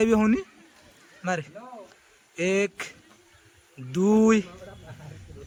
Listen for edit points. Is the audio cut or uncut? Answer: uncut